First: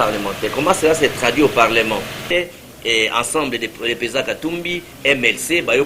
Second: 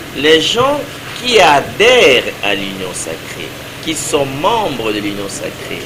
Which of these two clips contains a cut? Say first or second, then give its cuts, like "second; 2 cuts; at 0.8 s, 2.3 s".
first; 1 cut; at 2.2 s